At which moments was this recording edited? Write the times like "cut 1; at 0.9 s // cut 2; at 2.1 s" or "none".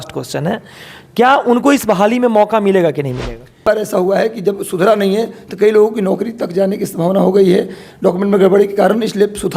cut 1; at 3.6 s